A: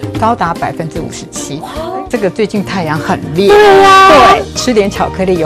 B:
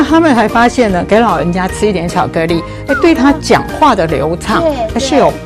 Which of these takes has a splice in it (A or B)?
A